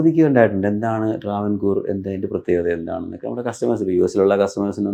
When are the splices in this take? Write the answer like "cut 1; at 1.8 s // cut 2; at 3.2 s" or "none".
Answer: none